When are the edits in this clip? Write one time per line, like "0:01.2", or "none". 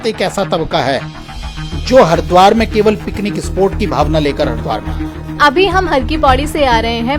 0:05.4